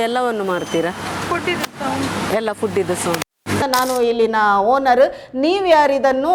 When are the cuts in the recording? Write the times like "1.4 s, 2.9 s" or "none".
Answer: 3.6 s